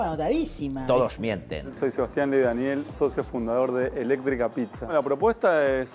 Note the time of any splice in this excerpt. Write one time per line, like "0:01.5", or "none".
0:01.6